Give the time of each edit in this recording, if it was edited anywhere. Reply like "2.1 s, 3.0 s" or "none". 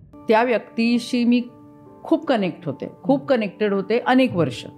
none